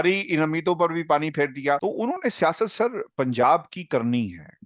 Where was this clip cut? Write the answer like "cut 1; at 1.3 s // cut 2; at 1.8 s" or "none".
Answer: cut 1; at 1.8 s